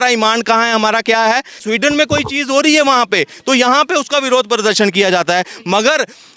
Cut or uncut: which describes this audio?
cut